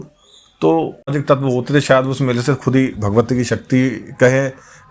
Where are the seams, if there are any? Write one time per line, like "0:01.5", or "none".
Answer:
0:01.1